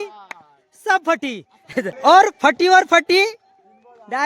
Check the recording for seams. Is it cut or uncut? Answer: cut